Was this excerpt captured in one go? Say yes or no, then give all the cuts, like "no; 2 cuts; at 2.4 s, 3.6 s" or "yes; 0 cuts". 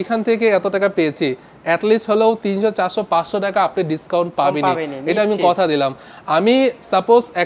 yes; 0 cuts